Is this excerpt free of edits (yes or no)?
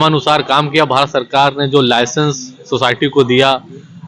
yes